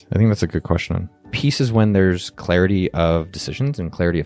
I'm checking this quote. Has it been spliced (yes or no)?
yes